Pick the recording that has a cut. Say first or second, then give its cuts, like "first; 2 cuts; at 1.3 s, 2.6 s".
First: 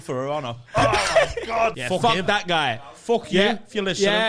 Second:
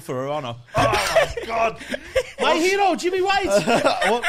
first; 1 cut; at 1.8 s